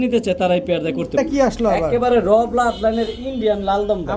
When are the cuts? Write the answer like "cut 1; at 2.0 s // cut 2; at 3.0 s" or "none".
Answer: cut 1; at 1.2 s